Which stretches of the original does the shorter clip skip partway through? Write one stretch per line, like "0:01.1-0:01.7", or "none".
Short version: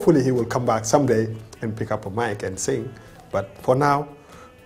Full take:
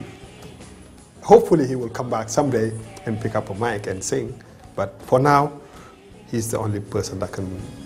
none